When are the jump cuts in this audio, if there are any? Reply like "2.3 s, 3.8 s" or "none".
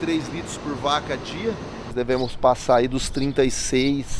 1.9 s